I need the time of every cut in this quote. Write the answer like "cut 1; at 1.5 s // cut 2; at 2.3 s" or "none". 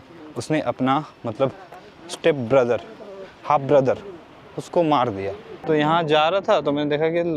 cut 1; at 5.5 s